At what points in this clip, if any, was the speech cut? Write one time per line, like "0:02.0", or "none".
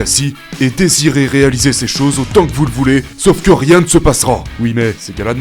0:04.5